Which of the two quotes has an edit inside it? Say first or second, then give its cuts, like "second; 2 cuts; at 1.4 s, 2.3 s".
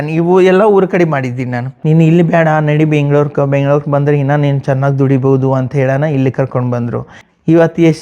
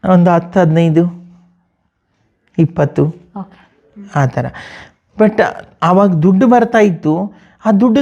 first; 2 cuts; at 1.7 s, 7.1 s